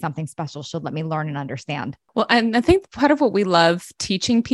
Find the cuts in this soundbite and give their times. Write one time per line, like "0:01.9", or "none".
0:02.0